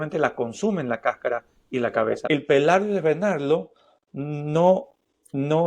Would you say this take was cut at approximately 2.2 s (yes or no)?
yes